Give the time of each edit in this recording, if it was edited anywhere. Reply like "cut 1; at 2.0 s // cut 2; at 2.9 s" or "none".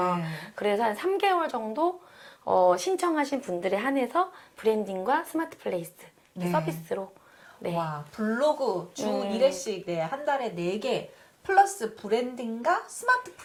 none